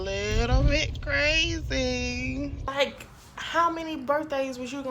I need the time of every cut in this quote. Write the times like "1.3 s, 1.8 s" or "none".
2.6 s